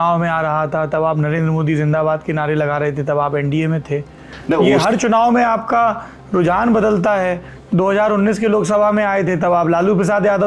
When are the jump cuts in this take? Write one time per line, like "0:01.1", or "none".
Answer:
none

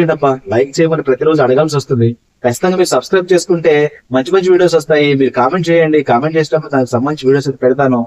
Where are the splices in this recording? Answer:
none

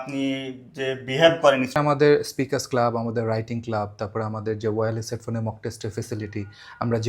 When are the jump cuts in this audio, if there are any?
0:01.8

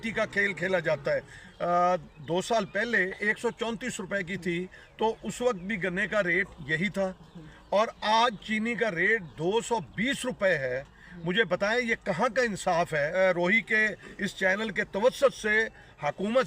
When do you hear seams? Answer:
0:01.4
0:13.1

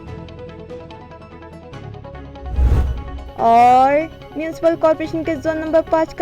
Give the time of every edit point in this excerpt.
none

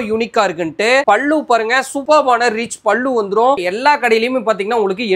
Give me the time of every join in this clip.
0:01.0
0:03.6

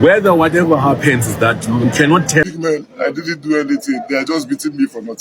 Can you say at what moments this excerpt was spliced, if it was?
0:02.4

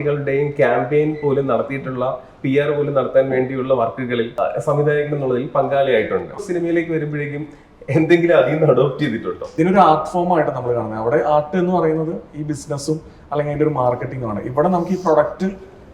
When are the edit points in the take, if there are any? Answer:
0:04.4
0:06.4
0:09.5

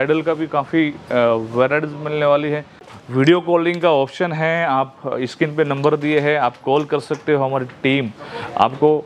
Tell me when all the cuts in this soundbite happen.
0:02.9

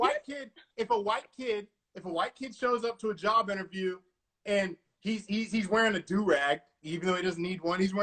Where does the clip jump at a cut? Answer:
none

